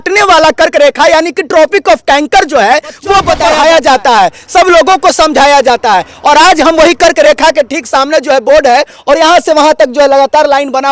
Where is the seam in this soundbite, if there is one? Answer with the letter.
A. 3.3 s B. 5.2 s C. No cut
A